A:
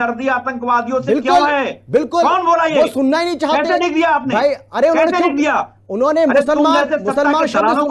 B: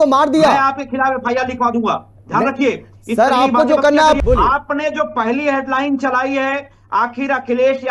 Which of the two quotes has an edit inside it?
B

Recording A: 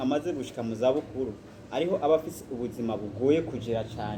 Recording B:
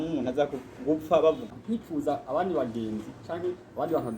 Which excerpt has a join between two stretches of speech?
B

